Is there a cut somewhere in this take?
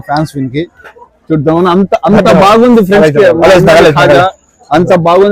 no; 0 cuts

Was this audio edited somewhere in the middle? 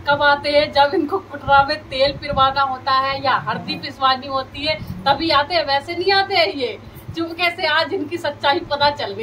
no; 0 cuts

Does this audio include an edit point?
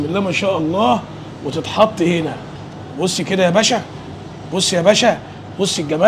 no; 0 cuts

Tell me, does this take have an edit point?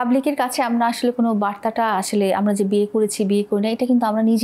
no; 0 cuts

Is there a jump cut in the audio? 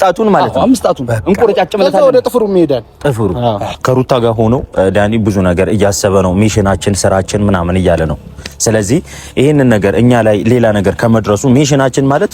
yes; 1 cut; at 3.7 s

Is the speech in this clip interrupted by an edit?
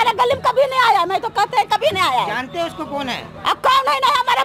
no; 0 cuts

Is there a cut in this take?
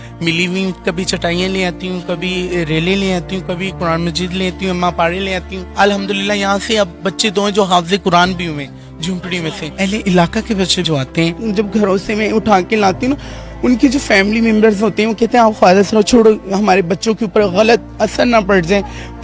yes; 2 cuts; at 5.6 s, 9.6 s

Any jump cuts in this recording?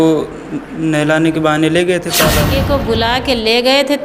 yes; 1 cut; at 2.4 s

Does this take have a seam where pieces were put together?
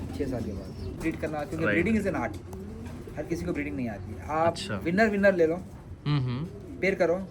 yes; 1 cut; at 1.0 s

